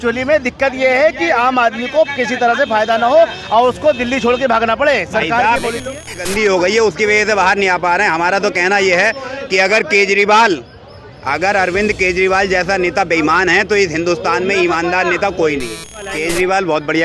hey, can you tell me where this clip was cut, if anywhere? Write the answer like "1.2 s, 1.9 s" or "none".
5.9 s, 16.0 s

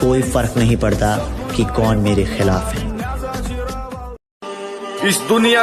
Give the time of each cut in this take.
4.2 s

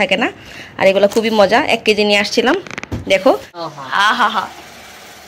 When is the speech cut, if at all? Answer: 3.5 s

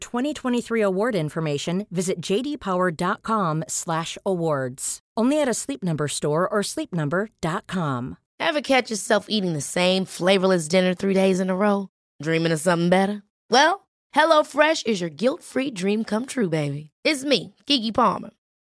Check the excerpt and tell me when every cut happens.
8.2 s

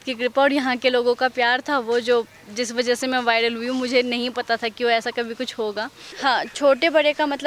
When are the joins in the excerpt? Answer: 6.0 s

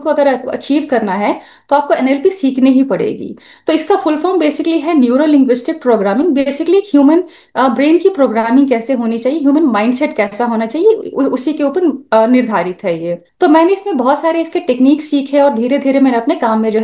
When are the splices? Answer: none

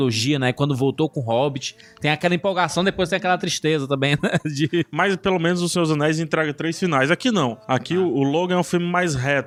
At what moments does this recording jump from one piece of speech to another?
none

